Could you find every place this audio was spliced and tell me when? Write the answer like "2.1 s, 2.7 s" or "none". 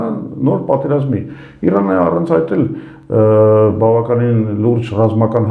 none

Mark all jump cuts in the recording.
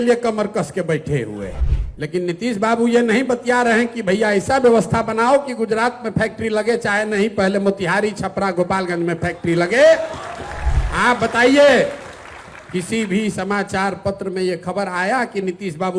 1.6 s

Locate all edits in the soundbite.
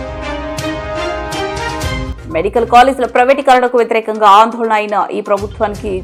none

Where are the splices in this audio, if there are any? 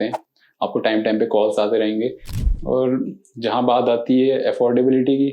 2.3 s

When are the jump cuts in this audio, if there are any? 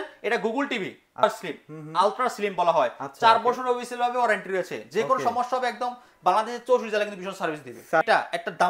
1.2 s, 8.0 s

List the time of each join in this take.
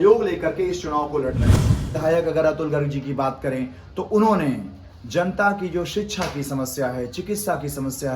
1.8 s

